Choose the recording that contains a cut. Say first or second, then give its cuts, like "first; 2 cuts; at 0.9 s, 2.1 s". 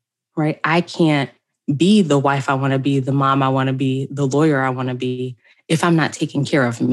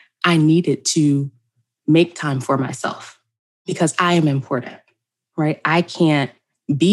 second; 1 cut; at 3.5 s